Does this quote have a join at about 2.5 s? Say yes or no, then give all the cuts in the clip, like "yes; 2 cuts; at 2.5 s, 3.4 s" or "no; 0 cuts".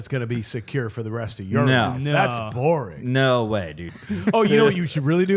no; 1 cut; at 3.9 s